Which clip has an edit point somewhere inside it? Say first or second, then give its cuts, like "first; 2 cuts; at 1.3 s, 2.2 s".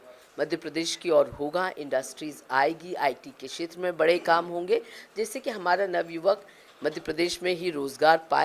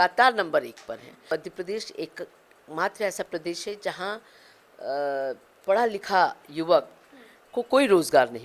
second; 1 cut; at 1.3 s